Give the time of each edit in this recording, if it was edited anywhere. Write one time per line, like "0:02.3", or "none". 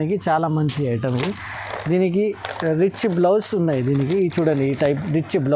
none